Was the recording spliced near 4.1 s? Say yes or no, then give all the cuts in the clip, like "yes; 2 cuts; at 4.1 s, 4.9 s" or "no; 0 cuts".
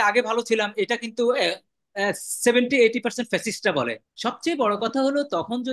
yes; 1 cut; at 4.1 s